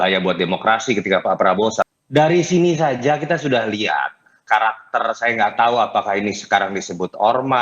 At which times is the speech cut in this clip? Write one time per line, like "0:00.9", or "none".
0:01.8